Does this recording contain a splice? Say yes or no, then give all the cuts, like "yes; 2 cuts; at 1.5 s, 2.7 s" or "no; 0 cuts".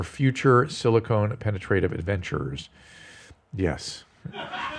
no; 0 cuts